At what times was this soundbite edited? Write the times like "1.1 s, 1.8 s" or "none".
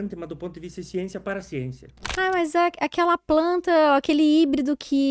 1.9 s